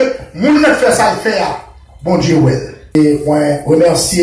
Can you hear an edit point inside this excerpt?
yes; 1 cut; at 2.9 s

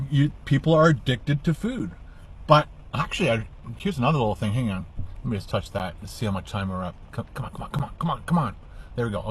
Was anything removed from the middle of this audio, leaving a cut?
no; 0 cuts

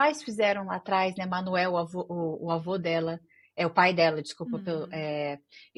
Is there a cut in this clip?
no; 0 cuts

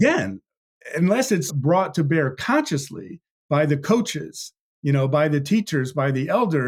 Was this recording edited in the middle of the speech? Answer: yes; 1 cut; at 1.5 s

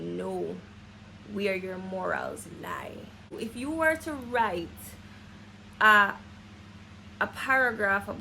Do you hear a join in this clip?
yes; 1 cut; at 3.3 s

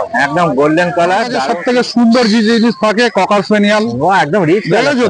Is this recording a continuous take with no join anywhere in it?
no; 1 cut; at 1.3 s

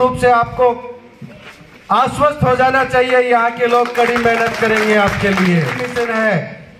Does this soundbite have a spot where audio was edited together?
yes; 1 cut; at 5.8 s

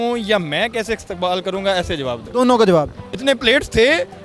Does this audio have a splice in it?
yes; 1 cut; at 3.0 s

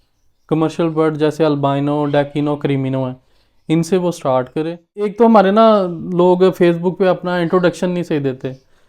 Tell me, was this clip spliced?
yes; 1 cut; at 5.1 s

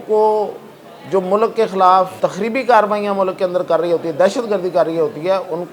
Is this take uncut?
no; 1 cut; at 2.1 s

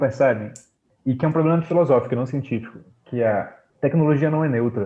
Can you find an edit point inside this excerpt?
no; 0 cuts

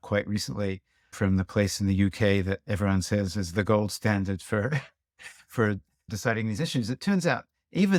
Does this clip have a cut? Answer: no; 0 cuts

